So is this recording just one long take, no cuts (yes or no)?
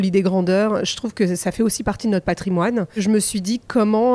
no